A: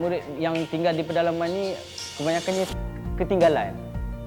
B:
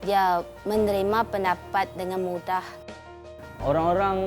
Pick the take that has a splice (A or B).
B